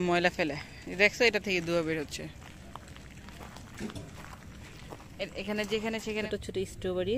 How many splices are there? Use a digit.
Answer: 1